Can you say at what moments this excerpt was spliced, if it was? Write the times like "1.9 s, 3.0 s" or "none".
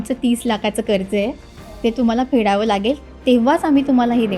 none